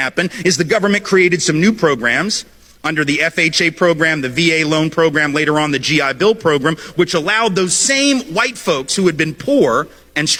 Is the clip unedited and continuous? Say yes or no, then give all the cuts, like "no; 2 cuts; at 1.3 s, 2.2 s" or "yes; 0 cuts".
yes; 0 cuts